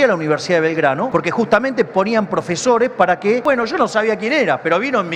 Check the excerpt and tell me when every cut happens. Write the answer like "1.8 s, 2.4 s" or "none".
1.0 s, 3.4 s